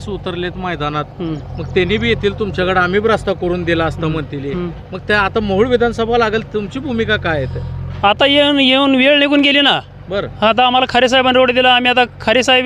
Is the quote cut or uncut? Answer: uncut